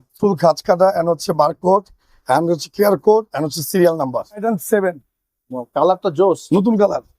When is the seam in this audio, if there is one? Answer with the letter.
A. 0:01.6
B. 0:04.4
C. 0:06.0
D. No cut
B